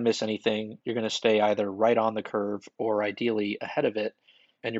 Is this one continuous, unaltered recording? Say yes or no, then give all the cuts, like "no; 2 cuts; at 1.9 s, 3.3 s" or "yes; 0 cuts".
yes; 0 cuts